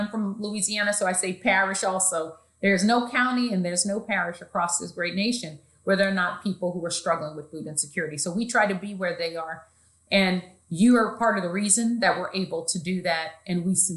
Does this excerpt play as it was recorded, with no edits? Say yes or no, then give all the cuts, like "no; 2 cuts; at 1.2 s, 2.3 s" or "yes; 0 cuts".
yes; 0 cuts